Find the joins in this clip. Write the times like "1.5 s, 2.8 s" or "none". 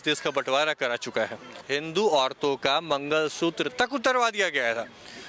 1.5 s

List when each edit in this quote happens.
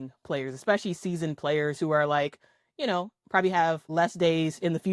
3.8 s

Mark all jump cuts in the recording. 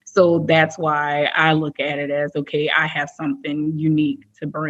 none

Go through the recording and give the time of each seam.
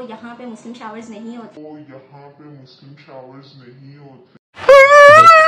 none

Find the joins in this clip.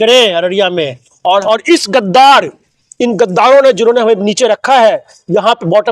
1.4 s

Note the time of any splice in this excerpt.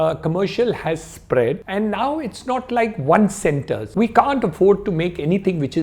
1.6 s, 3.8 s

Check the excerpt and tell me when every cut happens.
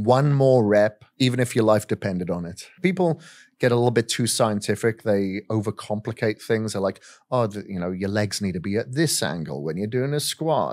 1.0 s, 2.7 s

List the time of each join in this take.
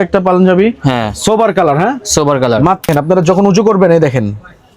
2.9 s

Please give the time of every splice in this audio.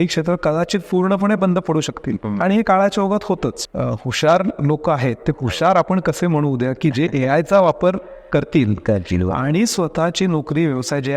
3.6 s

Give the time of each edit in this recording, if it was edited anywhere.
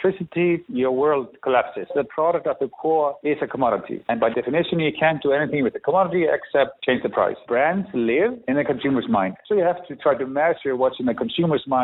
1.9 s, 7.4 s

